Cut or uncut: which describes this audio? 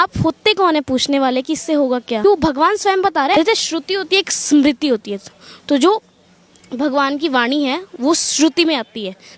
cut